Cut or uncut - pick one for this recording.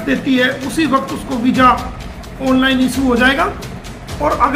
uncut